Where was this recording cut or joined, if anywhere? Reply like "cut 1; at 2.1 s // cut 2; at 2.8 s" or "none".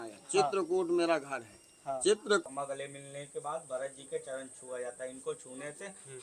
cut 1; at 2.4 s